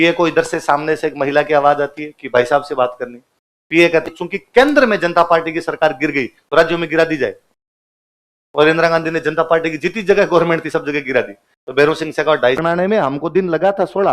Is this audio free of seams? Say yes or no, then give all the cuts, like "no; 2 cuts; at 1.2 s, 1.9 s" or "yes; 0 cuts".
no; 2 cuts; at 4.0 s, 12.6 s